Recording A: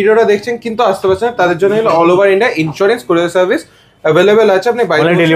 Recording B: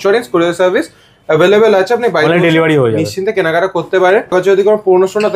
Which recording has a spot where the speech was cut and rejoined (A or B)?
B